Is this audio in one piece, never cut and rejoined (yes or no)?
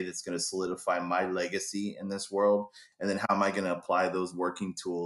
no